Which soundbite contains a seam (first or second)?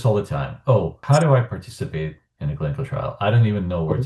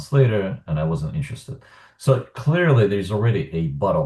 first